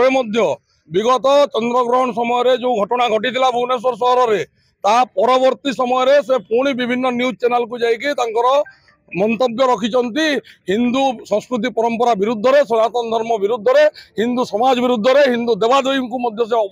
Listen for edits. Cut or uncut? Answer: uncut